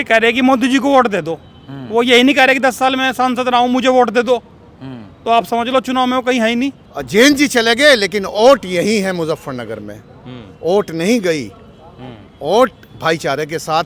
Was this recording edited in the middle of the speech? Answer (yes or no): yes